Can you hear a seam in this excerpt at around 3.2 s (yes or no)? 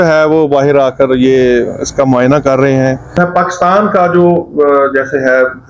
yes